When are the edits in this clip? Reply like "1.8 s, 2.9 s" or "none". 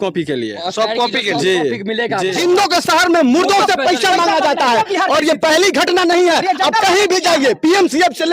2.3 s